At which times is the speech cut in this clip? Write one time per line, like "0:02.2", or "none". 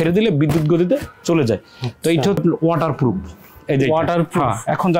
0:02.4

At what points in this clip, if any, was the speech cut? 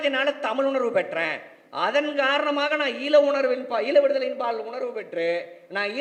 none

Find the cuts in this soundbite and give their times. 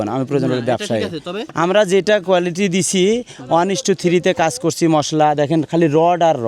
0:01.4

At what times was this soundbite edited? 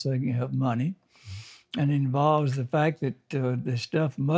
none

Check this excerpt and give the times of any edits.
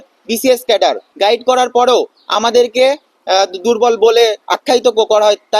0:01.1

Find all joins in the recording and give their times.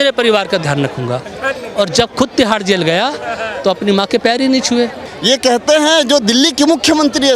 0:05.1

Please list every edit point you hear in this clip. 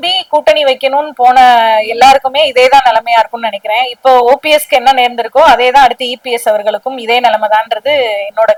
none

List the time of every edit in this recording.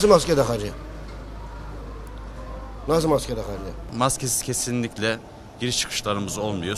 0:03.8

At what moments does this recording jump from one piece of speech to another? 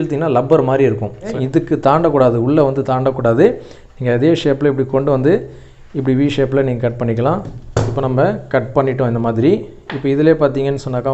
0:01.4
0:07.5

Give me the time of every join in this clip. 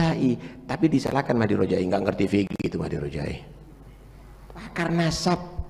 0:04.7

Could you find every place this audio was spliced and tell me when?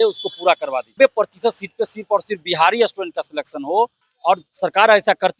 0:00.9
0:04.1

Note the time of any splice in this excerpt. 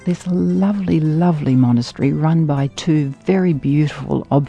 none

